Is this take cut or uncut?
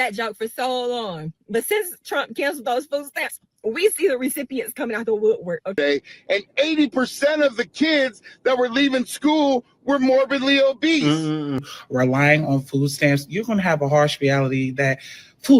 cut